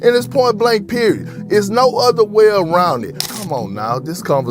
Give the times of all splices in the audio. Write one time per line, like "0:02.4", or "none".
0:03.0